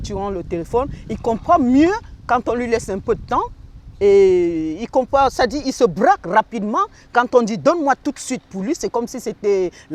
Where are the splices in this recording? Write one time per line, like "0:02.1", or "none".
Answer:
none